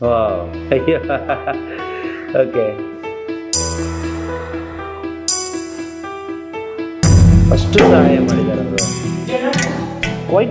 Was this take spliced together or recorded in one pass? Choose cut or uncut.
uncut